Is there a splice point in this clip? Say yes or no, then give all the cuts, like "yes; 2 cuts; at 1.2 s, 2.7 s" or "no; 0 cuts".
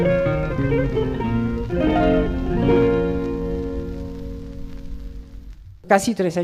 no; 0 cuts